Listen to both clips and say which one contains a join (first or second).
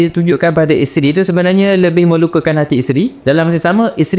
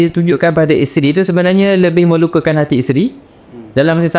first